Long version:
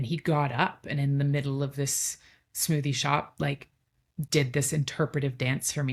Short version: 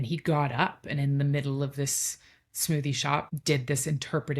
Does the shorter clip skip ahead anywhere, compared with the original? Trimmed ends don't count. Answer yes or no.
yes